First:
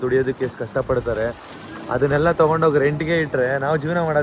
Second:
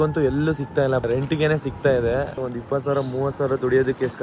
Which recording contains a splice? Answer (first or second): second